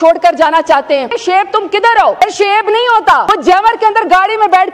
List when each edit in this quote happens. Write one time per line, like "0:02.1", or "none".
0:01.2
0:02.2
0:03.3